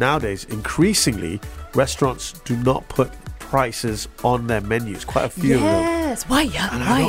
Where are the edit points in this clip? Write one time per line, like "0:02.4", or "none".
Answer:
none